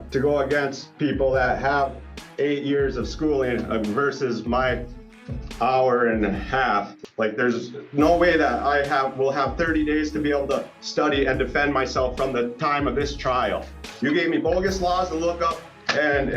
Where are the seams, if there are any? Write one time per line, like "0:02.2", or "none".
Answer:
0:06.9
0:13.6